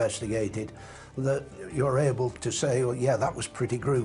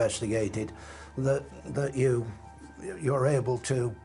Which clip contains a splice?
first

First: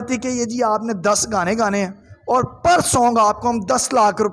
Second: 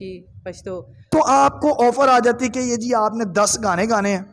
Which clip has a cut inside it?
second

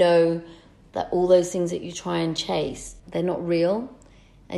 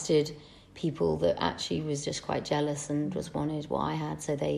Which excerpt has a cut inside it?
first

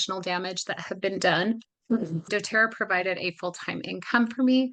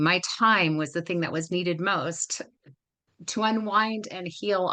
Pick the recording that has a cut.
first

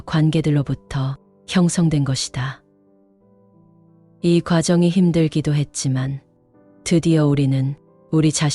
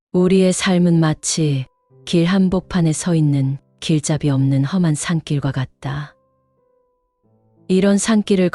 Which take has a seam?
first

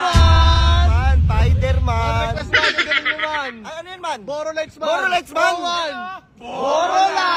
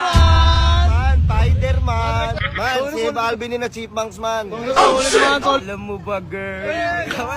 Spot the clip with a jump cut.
second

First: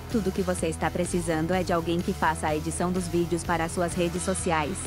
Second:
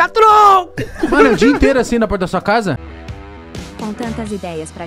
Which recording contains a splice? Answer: second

